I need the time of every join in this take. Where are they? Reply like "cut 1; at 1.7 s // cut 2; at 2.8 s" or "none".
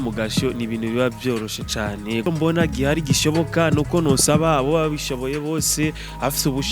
cut 1; at 2.3 s